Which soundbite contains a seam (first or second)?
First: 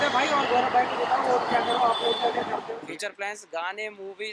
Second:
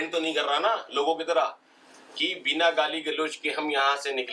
first